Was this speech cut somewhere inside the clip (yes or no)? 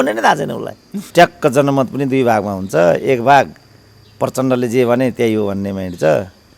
yes